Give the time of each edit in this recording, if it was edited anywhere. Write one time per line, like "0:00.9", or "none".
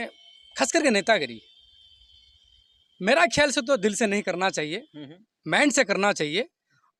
none